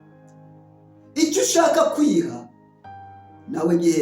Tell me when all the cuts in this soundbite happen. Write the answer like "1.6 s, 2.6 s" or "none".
1.1 s